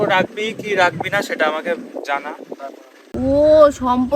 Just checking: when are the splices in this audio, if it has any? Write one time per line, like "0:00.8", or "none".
0:03.1